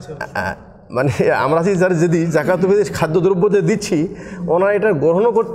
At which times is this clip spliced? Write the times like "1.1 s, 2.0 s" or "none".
none

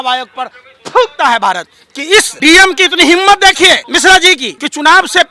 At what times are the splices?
2.3 s, 4.2 s

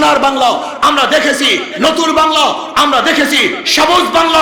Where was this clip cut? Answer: none

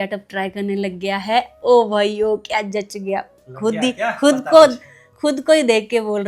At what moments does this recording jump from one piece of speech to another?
none

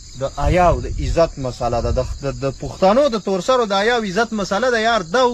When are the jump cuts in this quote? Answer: none

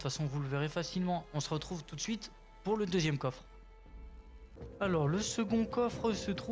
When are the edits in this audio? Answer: none

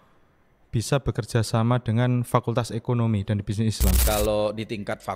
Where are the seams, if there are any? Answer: 4.0 s

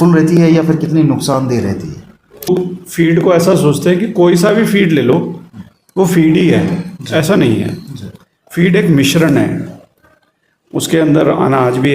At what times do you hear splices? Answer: 2.5 s

